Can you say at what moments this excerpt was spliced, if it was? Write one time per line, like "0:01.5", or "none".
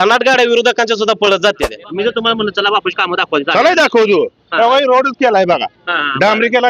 0:01.7